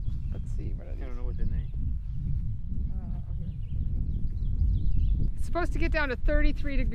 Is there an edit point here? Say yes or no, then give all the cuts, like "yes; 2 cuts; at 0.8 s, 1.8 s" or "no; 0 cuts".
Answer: yes; 1 cut; at 5.3 s